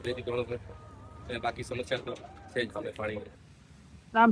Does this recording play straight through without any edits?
no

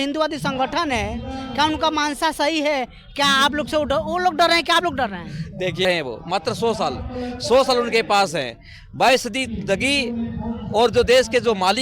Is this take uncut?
no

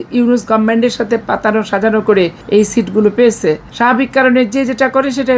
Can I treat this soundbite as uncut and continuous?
no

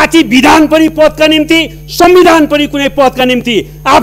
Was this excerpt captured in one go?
yes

